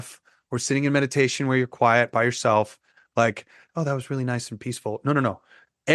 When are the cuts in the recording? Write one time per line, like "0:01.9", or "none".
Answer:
none